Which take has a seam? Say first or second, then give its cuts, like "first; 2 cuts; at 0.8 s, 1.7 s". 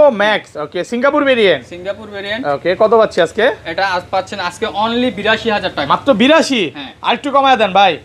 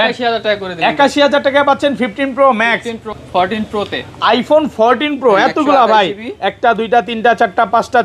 second; 1 cut; at 3.2 s